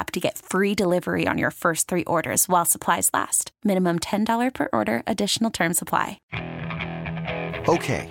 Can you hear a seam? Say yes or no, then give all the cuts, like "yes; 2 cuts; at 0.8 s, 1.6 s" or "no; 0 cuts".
yes; 1 cut; at 6.2 s